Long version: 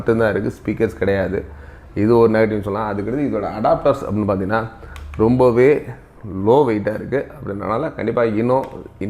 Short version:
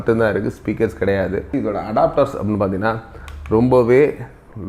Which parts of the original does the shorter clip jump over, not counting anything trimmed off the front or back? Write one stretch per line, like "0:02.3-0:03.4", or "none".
0:01.5-0:03.2